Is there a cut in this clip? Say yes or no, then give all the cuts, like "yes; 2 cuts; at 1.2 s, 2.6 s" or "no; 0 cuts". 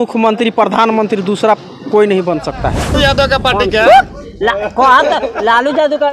yes; 1 cut; at 3.0 s